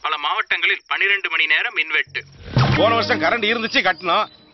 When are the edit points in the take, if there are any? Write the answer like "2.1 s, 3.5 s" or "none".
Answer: 2.7 s